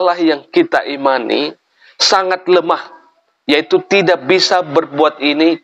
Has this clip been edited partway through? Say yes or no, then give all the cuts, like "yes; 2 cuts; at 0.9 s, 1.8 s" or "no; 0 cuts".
no; 0 cuts